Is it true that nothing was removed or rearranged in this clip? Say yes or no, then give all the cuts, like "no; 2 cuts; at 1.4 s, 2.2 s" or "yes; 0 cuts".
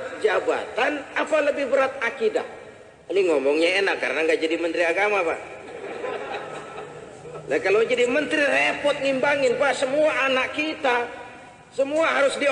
yes; 0 cuts